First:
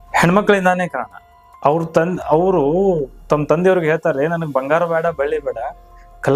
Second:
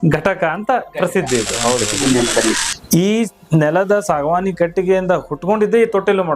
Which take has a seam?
second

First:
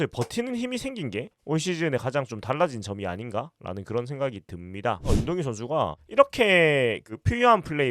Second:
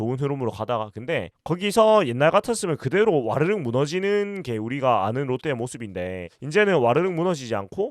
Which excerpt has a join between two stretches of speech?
first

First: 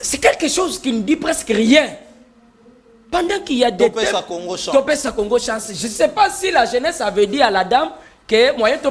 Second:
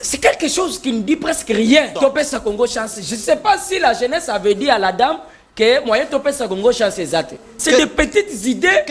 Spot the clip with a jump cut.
second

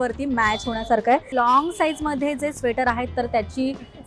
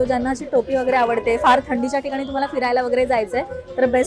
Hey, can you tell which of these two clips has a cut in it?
first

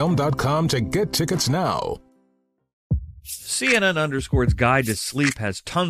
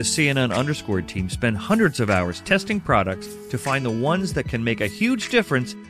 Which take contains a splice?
first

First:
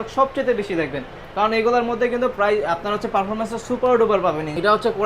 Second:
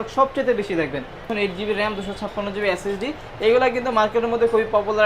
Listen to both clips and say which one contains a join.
second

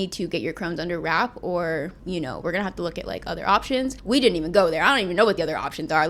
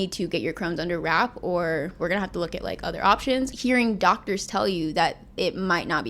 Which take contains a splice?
second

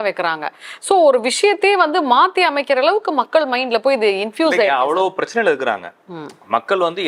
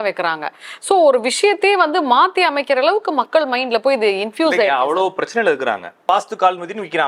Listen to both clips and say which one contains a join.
second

